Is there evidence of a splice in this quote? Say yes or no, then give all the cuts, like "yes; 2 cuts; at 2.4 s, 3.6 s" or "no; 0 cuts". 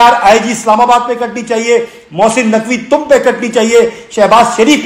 no; 0 cuts